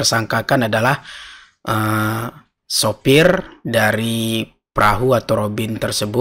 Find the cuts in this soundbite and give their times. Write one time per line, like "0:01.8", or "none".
none